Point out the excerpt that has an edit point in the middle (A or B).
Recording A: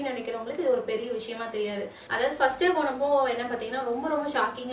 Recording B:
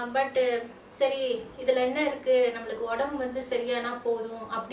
A